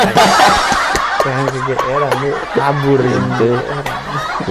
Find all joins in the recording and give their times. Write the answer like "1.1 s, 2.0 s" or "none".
none